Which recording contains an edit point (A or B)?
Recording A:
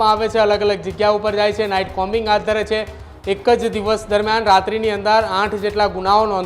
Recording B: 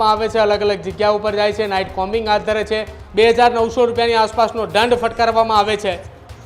B